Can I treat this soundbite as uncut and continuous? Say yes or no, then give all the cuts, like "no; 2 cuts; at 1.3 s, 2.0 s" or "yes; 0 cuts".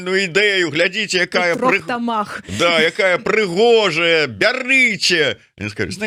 yes; 0 cuts